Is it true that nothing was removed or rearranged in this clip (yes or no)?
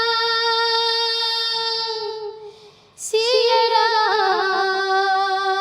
yes